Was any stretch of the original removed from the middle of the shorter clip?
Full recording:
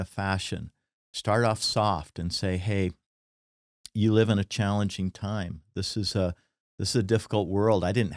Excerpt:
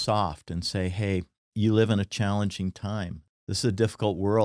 yes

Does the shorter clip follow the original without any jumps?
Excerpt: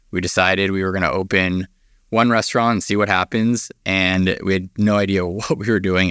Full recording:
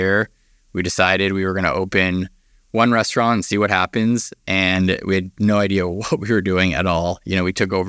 yes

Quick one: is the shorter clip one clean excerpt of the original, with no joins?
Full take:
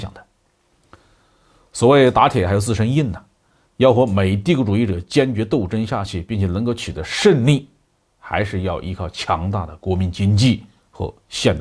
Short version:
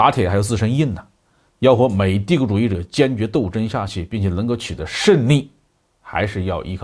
yes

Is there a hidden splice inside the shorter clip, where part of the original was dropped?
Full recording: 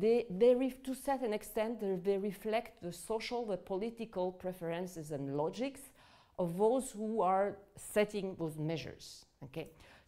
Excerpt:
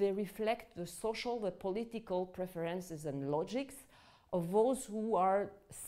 no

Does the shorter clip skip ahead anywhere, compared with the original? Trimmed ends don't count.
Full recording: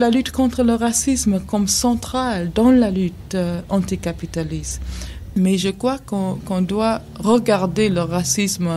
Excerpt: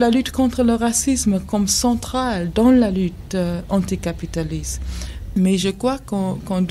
no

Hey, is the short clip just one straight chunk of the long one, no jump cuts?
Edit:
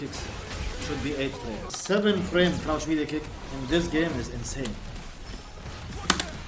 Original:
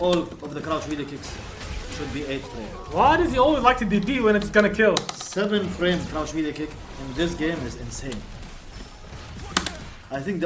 no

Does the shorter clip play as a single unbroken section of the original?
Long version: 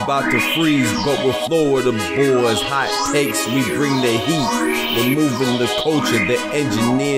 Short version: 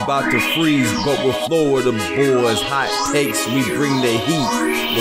yes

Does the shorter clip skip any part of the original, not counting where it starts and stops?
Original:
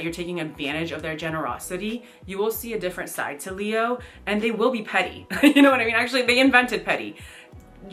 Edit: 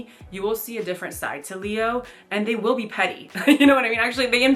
no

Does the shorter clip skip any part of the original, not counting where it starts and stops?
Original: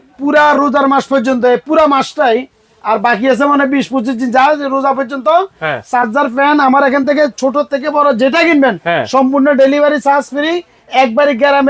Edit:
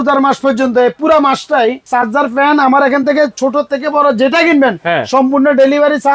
yes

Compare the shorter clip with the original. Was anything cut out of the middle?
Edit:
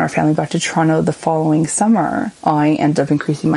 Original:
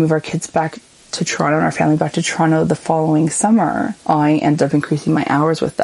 no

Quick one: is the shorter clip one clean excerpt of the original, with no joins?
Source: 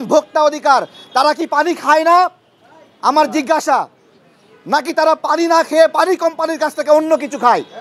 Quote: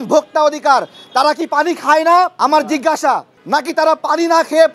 no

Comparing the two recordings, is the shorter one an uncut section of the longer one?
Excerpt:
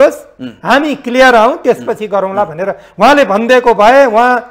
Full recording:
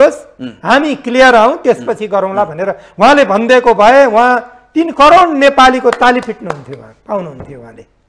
yes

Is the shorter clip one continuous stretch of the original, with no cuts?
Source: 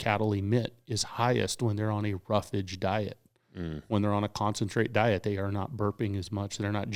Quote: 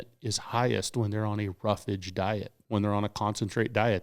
no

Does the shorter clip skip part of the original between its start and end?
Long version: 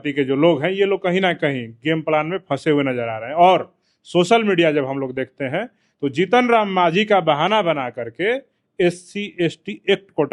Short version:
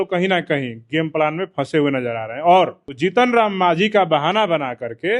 yes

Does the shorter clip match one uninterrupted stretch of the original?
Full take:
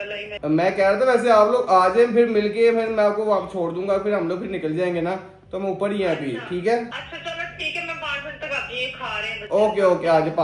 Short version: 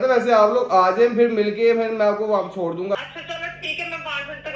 no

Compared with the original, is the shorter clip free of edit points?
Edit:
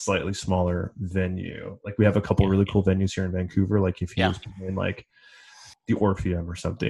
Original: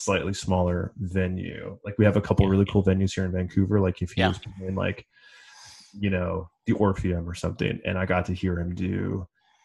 no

